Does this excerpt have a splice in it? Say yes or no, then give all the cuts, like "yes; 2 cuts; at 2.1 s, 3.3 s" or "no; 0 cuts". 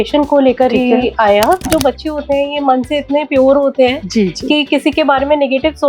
yes; 1 cut; at 1.6 s